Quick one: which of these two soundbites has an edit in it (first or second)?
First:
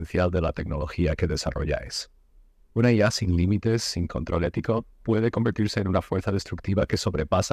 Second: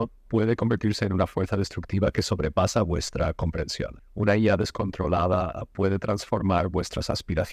second